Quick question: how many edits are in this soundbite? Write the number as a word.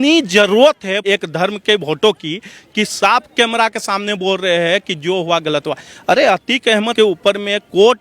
two